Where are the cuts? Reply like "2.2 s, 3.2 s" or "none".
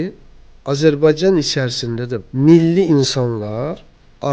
2.2 s